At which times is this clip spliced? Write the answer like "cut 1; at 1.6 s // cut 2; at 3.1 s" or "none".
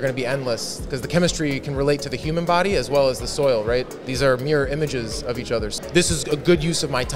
cut 1; at 5.7 s